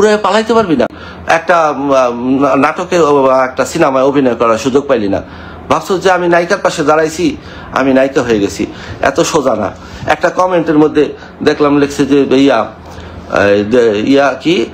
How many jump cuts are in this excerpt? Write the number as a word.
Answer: one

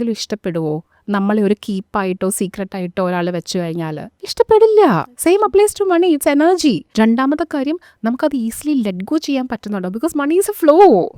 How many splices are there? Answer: one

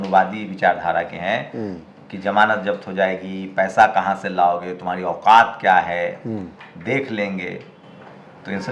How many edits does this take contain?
zero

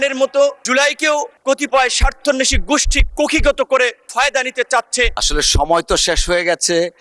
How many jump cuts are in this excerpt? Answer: one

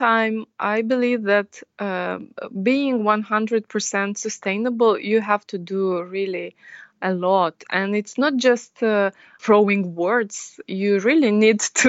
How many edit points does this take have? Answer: one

